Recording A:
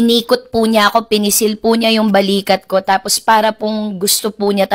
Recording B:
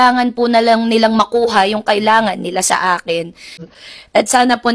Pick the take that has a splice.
B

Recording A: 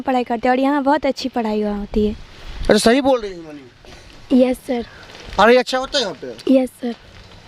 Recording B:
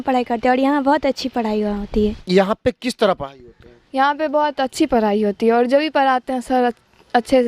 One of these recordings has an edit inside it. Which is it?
B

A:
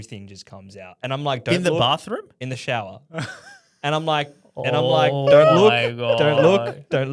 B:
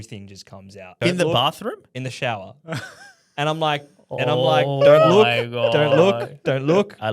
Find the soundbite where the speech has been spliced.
B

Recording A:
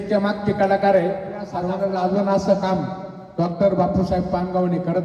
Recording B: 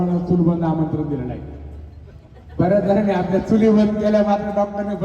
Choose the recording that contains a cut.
A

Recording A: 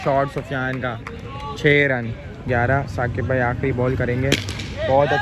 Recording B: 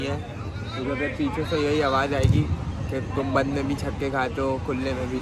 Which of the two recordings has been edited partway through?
A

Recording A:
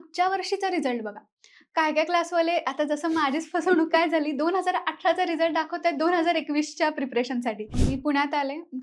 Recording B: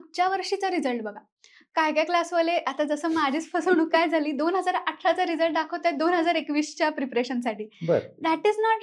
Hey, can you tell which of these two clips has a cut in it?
A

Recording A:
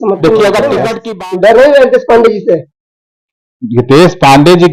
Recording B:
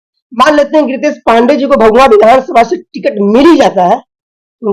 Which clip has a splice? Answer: A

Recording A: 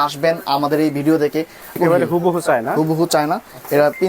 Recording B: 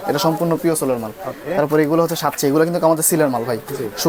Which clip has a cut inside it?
A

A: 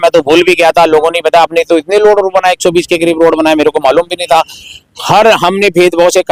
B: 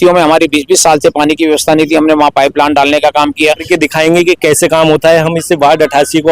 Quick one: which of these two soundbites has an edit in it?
B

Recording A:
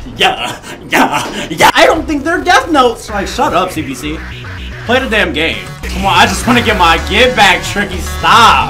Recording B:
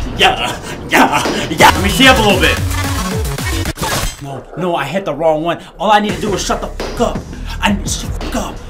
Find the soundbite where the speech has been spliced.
B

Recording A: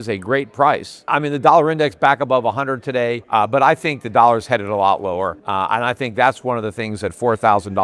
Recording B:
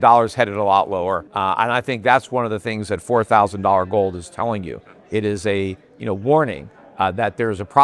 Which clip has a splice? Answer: A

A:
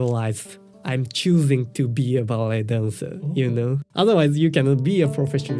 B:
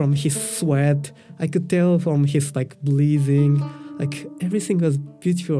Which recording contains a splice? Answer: A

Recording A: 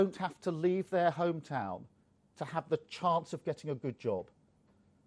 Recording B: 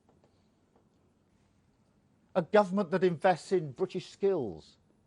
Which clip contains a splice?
B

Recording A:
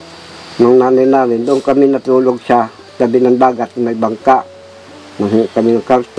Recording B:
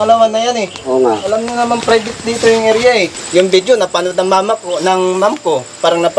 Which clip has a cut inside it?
B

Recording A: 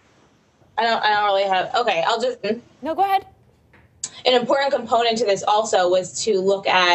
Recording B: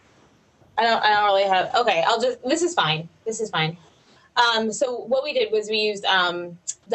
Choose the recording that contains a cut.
B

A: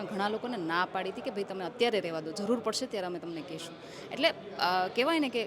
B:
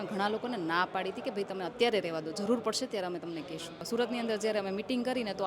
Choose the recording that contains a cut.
B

